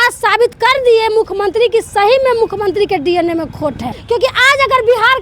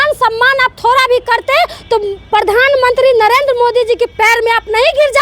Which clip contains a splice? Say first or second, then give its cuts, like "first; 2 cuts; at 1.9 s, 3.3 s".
first; 1 cut; at 3.9 s